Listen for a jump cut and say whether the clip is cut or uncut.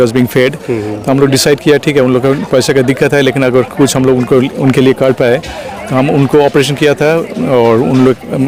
uncut